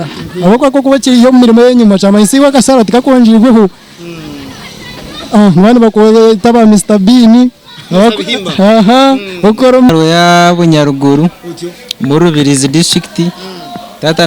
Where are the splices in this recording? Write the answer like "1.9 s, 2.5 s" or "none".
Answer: 9.9 s